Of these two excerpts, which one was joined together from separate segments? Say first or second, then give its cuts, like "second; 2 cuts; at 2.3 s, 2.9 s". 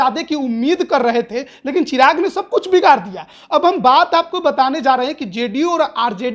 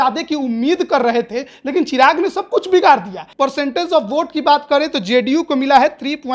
second; 1 cut; at 3.2 s